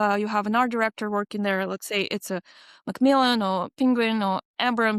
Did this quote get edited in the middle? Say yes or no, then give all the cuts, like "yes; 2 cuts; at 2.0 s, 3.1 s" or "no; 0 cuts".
no; 0 cuts